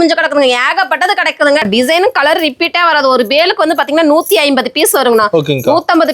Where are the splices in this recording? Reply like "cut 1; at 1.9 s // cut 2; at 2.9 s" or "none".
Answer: cut 1; at 1.6 s